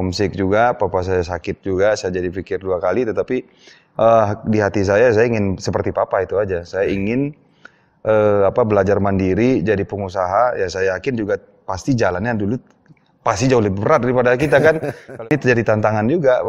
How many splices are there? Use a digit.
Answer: 1